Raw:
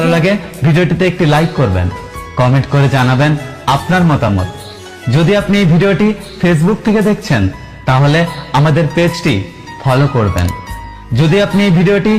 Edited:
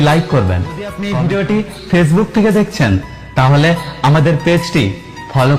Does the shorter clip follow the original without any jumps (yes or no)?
no